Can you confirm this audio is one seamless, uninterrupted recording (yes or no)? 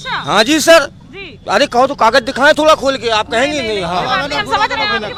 yes